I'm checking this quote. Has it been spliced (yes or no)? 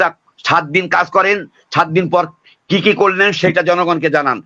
no